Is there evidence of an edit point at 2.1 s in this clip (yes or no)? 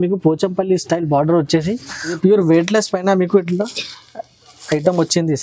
yes